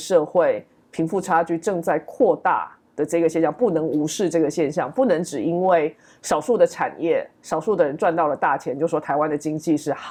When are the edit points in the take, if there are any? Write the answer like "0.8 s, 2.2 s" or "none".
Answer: none

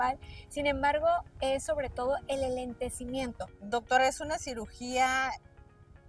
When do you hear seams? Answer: 3.5 s

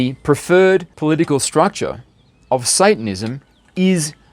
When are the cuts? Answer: 0.9 s

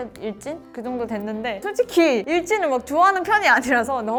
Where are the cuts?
none

